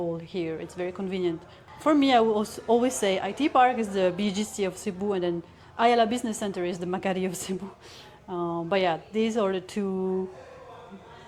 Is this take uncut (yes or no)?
yes